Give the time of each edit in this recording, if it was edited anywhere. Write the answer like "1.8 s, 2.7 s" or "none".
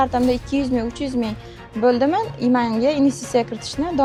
none